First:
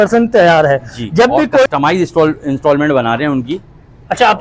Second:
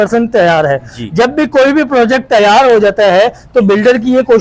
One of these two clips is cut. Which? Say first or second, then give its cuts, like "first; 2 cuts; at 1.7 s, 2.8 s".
first; 1 cut; at 1.7 s